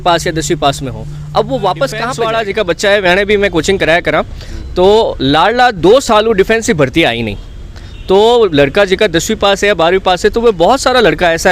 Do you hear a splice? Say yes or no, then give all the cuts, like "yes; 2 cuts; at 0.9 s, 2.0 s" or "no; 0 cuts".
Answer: yes; 1 cut; at 2.2 s